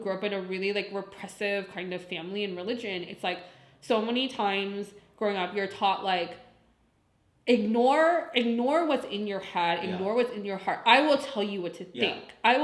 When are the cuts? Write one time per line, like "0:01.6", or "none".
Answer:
none